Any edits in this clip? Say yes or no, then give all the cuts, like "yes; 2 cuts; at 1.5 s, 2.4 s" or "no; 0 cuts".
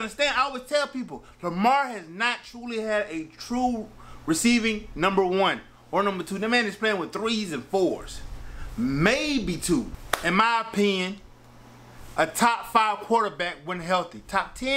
yes; 1 cut; at 10.0 s